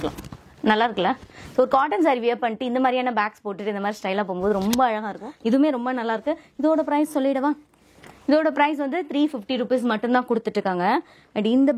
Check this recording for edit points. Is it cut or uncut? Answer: uncut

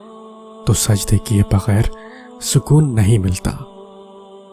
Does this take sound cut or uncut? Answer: cut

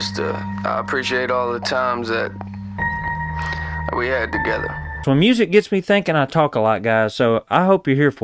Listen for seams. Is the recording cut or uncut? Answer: cut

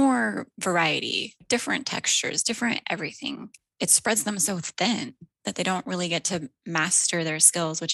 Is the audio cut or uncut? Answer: cut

